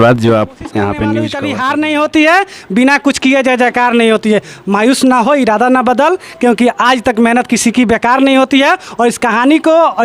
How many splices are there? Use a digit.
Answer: 1